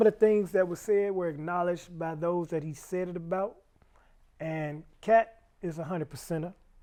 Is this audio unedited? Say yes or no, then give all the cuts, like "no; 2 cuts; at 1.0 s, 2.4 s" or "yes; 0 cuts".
yes; 0 cuts